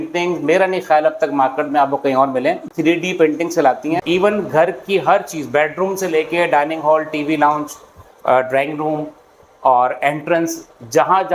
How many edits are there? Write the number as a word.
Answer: two